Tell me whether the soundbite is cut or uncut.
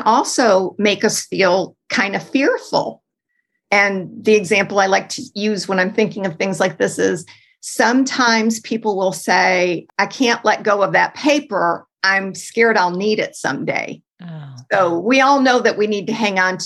cut